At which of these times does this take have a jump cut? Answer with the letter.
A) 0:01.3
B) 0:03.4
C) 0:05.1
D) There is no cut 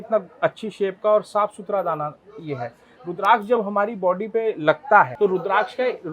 C